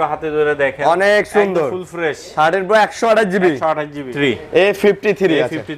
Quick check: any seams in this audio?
yes; 1 cut; at 4.1 s

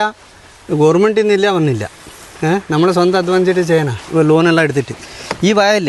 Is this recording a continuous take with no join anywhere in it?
yes; 0 cuts

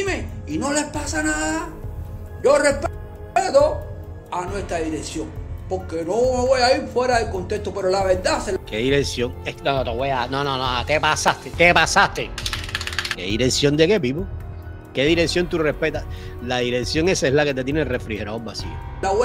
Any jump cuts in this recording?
no; 0 cuts

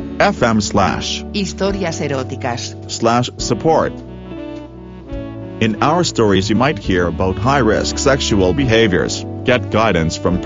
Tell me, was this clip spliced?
yes; 2 cuts; at 3.9 s, 5.6 s

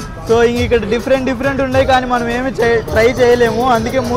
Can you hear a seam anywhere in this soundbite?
no; 0 cuts

